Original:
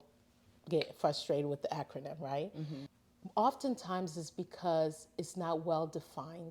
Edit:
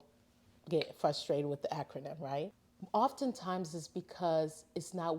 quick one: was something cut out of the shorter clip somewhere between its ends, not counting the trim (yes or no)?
yes